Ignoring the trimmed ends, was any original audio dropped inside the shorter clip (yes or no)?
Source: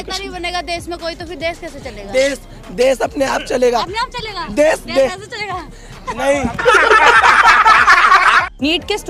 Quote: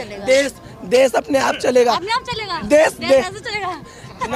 no